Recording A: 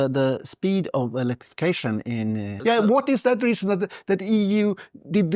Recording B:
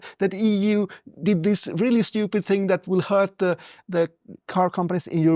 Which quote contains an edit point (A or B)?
A